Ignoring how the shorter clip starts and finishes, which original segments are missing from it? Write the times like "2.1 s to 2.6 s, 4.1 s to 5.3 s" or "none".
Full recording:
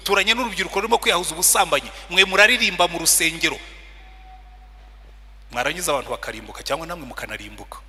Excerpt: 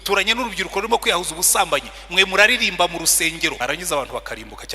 3.6 s to 5.5 s